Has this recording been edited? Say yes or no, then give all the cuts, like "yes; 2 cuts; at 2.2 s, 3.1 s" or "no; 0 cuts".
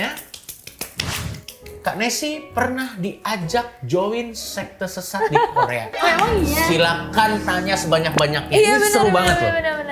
no; 0 cuts